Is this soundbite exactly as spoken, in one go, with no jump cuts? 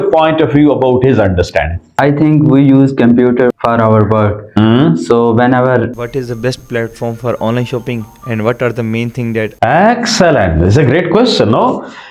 no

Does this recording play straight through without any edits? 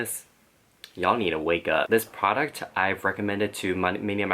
no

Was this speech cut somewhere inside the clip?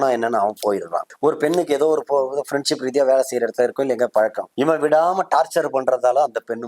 yes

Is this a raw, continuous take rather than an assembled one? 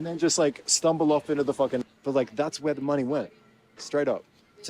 no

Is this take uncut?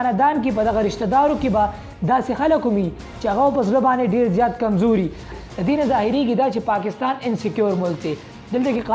no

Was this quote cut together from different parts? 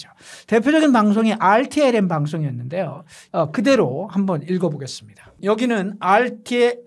yes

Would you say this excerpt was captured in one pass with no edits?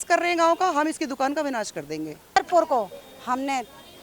no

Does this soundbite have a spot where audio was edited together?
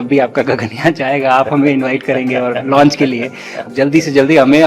yes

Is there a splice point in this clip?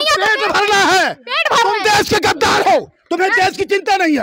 no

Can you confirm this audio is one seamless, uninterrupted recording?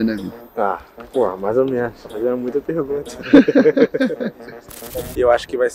no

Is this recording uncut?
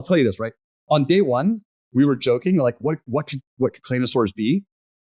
yes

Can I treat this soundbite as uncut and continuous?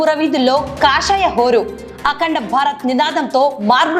yes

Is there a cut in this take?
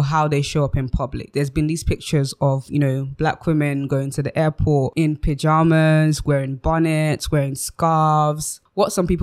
no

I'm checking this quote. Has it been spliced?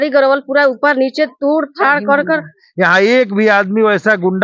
yes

